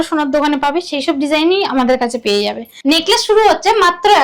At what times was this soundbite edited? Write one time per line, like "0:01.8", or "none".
0:02.7